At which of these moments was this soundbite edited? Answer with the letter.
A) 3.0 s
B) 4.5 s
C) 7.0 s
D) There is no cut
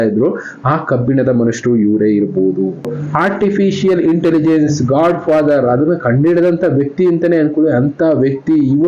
A